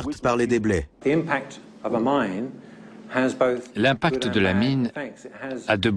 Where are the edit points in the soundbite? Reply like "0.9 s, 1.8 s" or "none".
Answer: 0.9 s